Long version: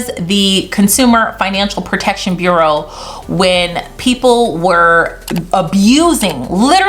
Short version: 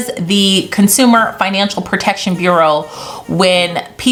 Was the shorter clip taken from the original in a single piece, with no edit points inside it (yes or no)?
yes